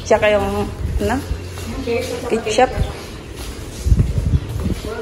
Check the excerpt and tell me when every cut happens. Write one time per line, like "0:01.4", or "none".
none